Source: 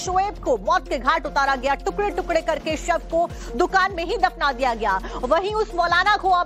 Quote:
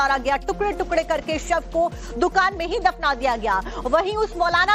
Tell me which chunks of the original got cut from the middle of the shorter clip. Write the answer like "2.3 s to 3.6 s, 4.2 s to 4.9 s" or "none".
none